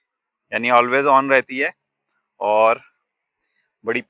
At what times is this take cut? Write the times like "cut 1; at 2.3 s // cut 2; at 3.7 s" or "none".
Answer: none